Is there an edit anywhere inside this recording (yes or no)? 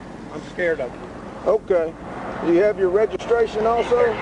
no